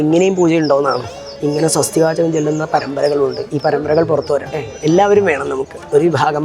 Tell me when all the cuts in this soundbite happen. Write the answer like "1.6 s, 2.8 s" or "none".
1.4 s, 4.7 s